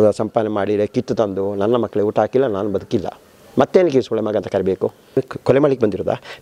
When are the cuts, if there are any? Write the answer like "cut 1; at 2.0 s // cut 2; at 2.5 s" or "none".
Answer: cut 1; at 5.2 s

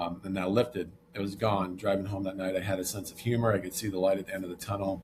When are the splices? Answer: none

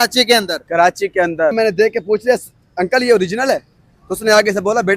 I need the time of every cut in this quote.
cut 1; at 1.5 s

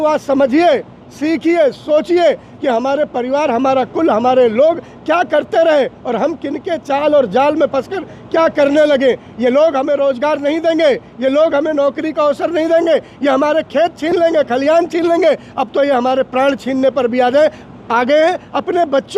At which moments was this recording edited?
none

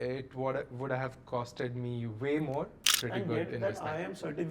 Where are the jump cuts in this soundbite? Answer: cut 1; at 3.0 s

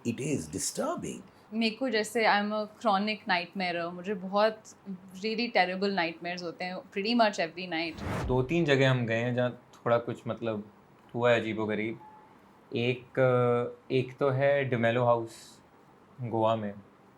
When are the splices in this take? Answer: cut 1; at 1.4 s // cut 2; at 8.2 s

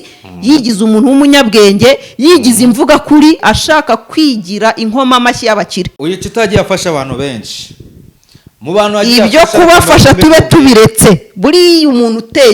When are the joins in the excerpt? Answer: cut 1; at 3.4 s // cut 2; at 5.9 s

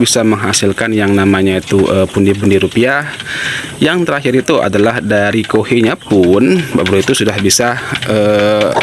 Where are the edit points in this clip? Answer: none

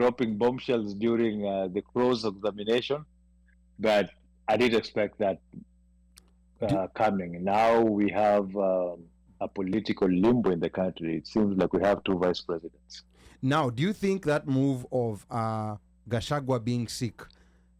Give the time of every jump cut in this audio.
none

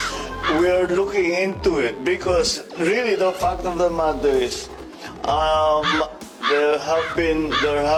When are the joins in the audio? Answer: none

